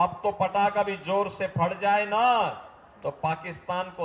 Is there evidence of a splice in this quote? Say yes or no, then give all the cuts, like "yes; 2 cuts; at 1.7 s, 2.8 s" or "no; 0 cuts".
no; 0 cuts